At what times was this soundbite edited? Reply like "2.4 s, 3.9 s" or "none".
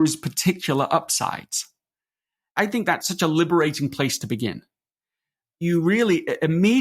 2.5 s, 5.5 s

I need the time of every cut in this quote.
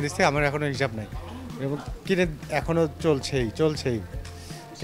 none

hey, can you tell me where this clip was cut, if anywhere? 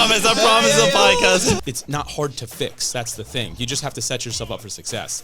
1.6 s

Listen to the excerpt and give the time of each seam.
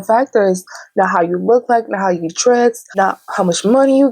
2.9 s

